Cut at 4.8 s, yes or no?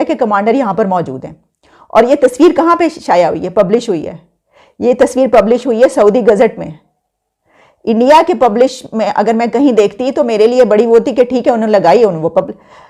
no